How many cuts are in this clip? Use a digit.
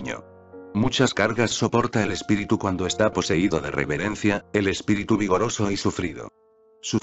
0